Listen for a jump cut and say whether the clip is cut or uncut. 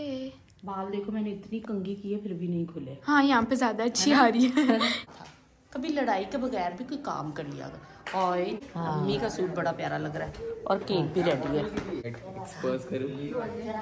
cut